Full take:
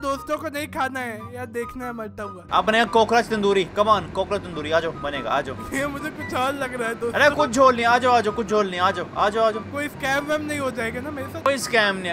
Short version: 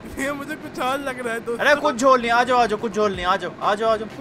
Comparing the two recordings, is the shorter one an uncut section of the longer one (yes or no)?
yes